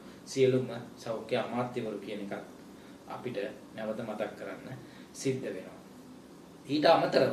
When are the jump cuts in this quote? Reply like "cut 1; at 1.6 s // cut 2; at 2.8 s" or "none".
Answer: none